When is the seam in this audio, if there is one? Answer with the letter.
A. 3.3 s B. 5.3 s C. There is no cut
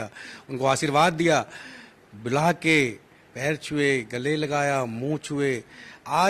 C